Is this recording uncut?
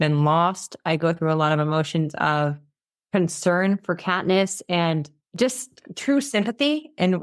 no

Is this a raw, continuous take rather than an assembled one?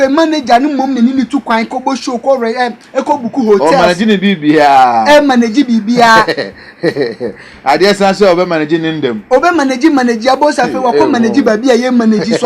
yes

